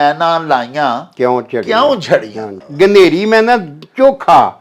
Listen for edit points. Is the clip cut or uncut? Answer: cut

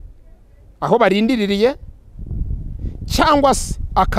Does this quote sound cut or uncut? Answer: uncut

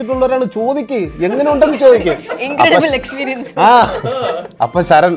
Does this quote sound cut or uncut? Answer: uncut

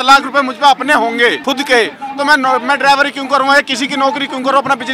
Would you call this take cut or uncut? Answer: cut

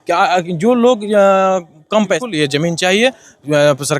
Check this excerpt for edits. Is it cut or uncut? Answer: cut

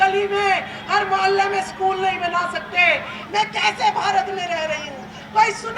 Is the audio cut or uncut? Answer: cut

